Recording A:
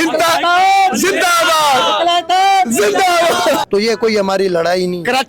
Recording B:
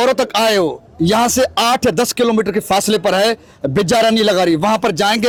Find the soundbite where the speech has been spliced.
A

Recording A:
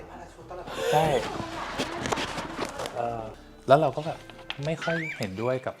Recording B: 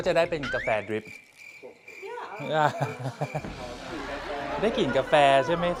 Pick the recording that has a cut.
A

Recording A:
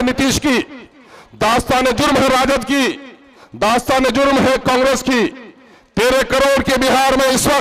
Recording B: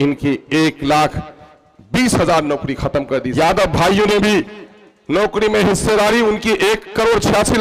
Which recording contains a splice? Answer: B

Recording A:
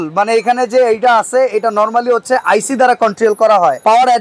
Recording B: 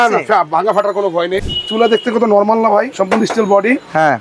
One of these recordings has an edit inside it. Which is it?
B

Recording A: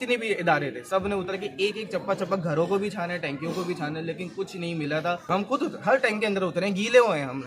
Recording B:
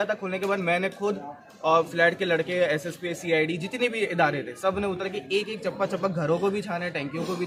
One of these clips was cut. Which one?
A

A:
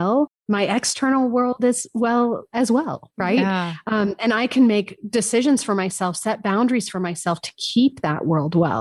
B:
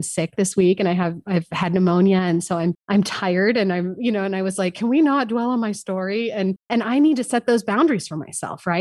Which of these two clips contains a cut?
B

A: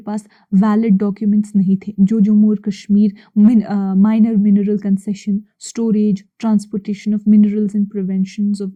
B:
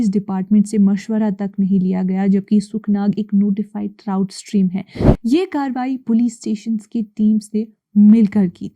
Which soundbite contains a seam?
B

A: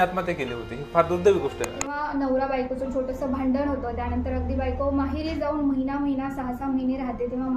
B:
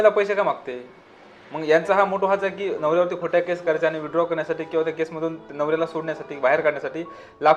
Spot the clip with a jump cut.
A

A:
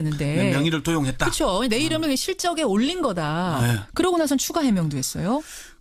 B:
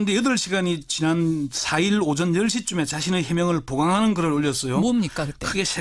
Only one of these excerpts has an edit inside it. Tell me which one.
A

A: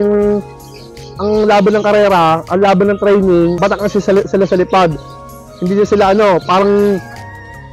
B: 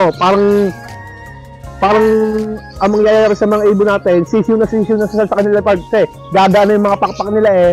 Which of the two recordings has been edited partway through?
A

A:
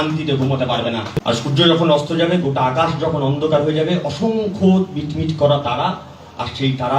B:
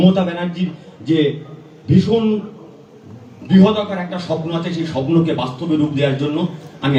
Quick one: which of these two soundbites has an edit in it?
A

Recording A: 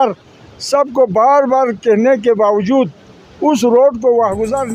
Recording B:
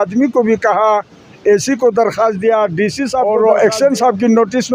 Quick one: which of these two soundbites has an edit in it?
B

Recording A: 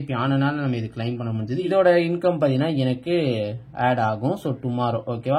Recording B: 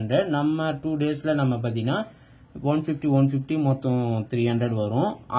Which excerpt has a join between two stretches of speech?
A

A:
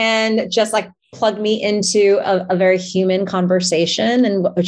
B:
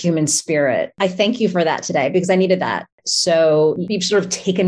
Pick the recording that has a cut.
B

